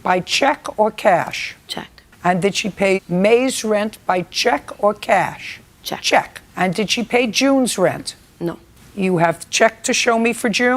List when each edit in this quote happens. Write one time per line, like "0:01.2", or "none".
none